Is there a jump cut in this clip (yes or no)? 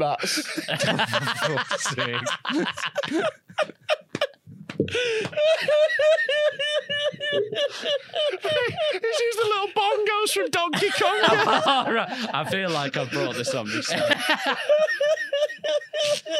no